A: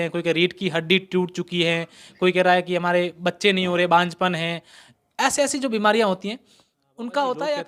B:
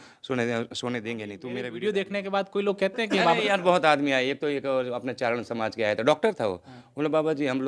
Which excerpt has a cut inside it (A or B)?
B